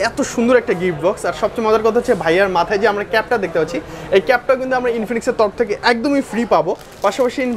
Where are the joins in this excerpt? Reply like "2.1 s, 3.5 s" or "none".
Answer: none